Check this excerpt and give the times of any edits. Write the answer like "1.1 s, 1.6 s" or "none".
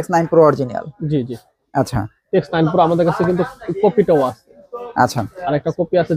none